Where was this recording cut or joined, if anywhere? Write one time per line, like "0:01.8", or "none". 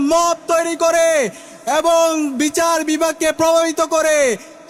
none